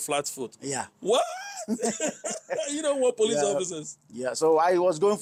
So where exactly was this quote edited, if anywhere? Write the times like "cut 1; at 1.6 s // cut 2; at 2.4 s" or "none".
none